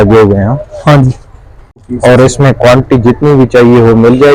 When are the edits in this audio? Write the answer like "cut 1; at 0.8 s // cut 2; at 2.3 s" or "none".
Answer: cut 1; at 1.9 s